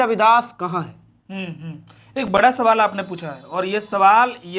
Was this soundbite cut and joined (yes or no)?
no